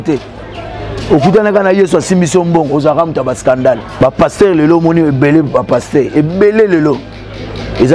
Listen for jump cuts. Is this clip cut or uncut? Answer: cut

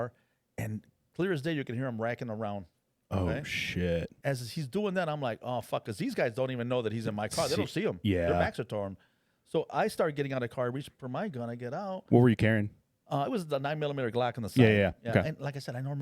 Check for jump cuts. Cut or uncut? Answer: cut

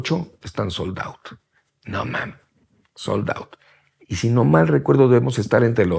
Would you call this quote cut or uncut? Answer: uncut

